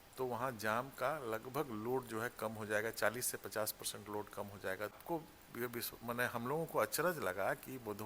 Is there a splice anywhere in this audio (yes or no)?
yes